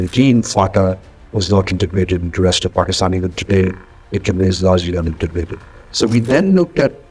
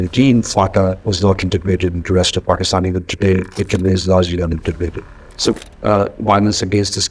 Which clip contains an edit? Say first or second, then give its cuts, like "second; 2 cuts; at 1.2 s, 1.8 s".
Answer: second; 3 cuts; at 1.0 s, 3.5 s, 5.5 s